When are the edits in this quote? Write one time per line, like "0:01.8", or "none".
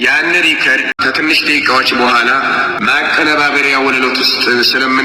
0:00.9
0:02.7